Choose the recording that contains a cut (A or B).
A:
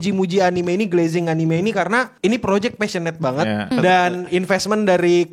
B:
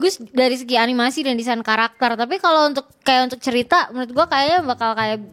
A